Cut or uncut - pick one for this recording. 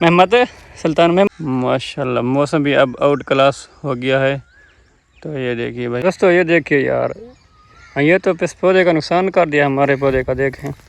cut